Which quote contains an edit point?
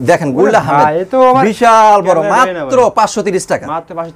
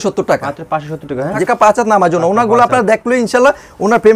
second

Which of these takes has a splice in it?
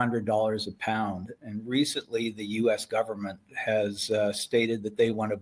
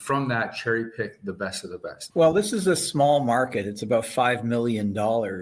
second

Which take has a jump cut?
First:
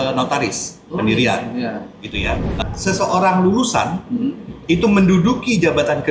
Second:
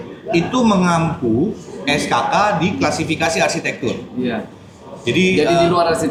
first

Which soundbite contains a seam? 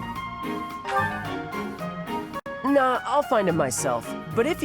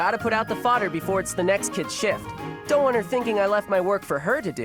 first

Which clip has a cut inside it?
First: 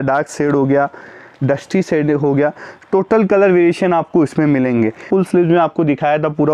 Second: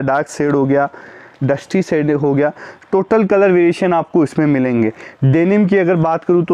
first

